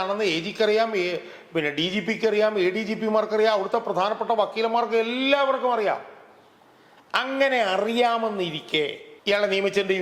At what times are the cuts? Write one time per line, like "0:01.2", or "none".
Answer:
0:09.1